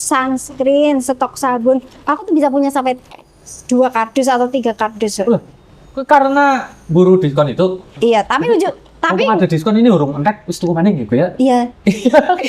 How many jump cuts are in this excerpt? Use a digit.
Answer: 0